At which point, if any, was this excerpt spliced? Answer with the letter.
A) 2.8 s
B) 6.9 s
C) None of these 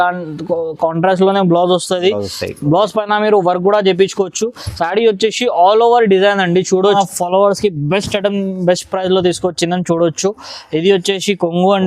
B